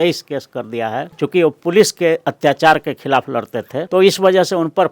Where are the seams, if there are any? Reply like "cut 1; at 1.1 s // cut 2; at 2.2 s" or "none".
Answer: cut 1; at 1.1 s // cut 2; at 3.8 s